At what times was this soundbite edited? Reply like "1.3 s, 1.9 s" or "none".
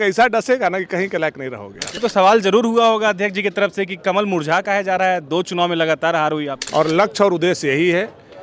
2.0 s, 6.6 s

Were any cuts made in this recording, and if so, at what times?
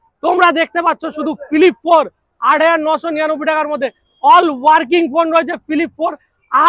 none

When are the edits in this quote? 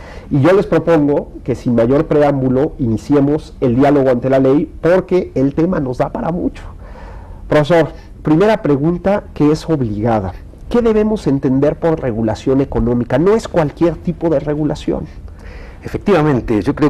10.0 s

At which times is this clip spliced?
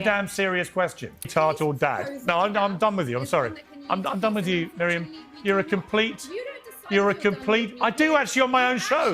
1.3 s

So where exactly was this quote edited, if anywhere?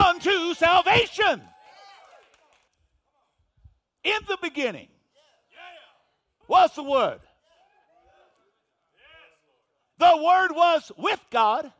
2.7 s

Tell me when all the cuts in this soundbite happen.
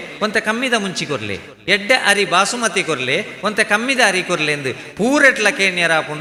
none

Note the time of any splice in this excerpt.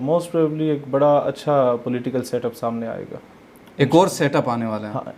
none

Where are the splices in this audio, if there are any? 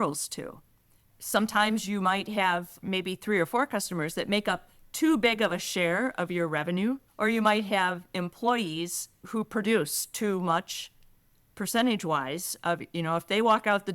2.8 s, 7.1 s, 9.2 s

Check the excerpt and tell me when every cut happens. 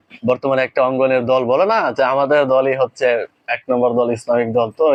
none

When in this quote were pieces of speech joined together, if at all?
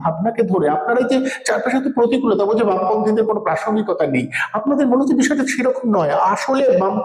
none

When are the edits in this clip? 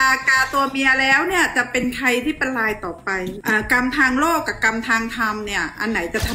3.3 s

